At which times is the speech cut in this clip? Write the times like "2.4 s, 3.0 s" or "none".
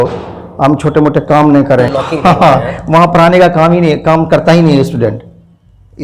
2.0 s